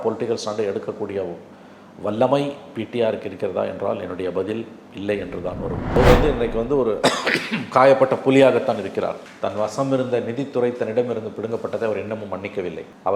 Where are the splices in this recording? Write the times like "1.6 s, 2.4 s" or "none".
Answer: 5.8 s